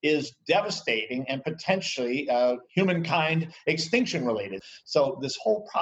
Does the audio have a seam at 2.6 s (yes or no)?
yes